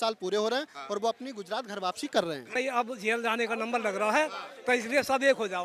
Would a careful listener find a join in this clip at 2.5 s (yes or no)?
yes